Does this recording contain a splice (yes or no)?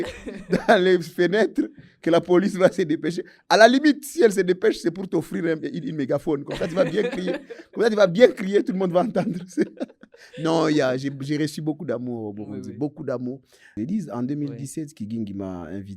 yes